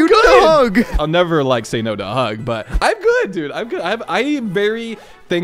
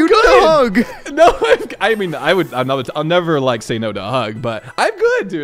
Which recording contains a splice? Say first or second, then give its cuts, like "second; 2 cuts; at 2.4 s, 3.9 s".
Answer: first; 1 cut; at 1.0 s